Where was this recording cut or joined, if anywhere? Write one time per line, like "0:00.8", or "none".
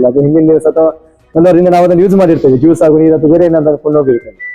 none